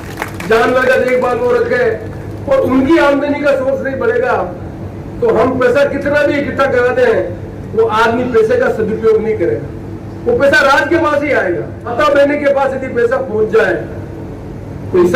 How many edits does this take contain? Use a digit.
0